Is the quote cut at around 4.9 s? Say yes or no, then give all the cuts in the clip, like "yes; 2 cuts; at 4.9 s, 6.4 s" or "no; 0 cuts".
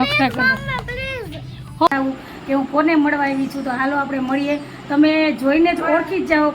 no; 1 cut; at 1.9 s